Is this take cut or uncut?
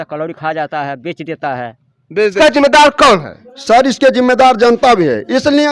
cut